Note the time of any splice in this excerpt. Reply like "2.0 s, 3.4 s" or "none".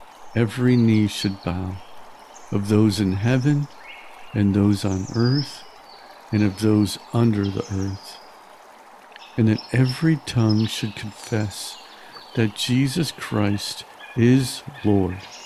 8.0 s, 9.4 s